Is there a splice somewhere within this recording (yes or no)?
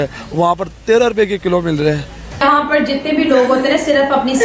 yes